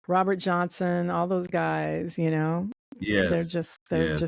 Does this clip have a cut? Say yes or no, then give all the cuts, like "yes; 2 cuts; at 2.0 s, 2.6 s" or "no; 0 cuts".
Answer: no; 0 cuts